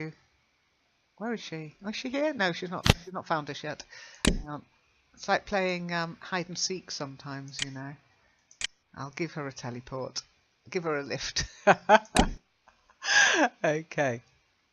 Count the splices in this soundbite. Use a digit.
1